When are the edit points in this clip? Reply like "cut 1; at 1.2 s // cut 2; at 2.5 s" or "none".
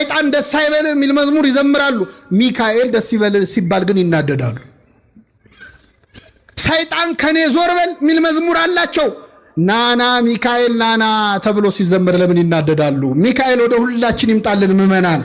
none